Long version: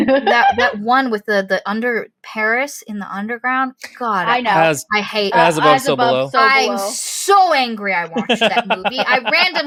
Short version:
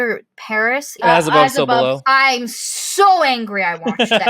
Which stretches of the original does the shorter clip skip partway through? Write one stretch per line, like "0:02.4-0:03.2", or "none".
0:02.9-0:05.3